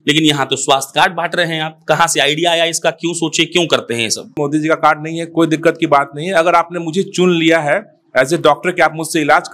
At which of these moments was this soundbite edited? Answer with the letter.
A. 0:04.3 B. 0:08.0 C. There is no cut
A